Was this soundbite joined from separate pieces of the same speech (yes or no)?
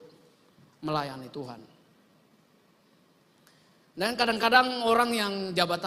no